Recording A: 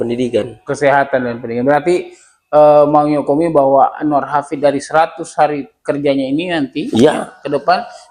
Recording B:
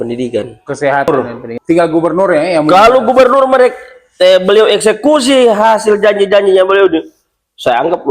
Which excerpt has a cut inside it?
B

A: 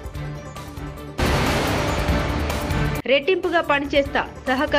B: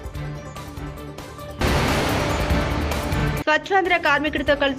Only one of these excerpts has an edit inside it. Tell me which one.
A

